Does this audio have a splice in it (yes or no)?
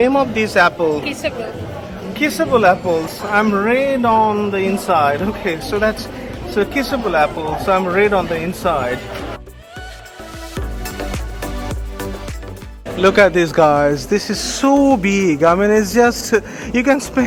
no